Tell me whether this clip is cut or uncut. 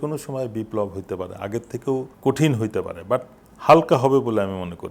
cut